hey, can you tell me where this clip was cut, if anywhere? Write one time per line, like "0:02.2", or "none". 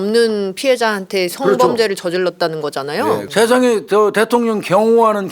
0:03.3